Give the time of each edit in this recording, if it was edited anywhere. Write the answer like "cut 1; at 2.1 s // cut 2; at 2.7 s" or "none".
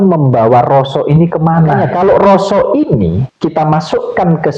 cut 1; at 1.8 s // cut 2; at 3.3 s

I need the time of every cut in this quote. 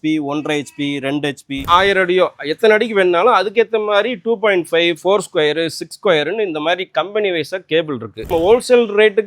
cut 1; at 1.7 s // cut 2; at 8.2 s

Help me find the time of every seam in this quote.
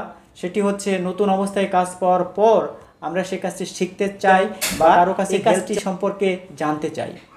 cut 1; at 5.3 s

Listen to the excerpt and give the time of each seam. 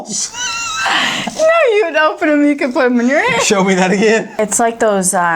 cut 1; at 4.3 s

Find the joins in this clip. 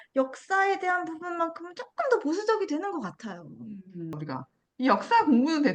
cut 1; at 4.1 s

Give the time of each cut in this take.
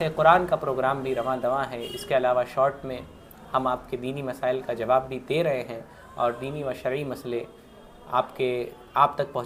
none

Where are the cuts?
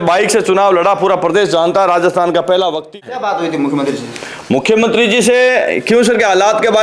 cut 1; at 2.9 s

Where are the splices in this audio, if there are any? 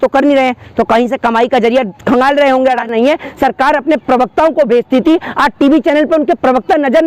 cut 1; at 2.8 s

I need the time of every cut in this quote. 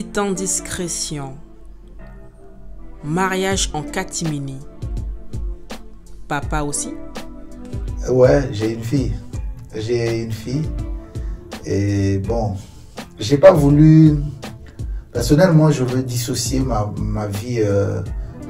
none

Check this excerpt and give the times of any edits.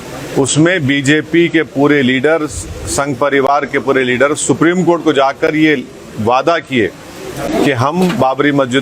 none

